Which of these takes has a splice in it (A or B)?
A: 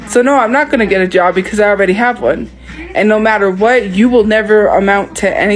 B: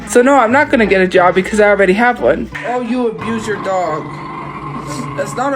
B